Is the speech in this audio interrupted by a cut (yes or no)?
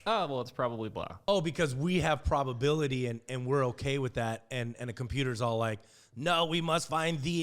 yes